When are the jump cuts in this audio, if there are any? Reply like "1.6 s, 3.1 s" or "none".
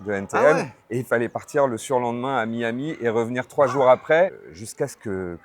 4.4 s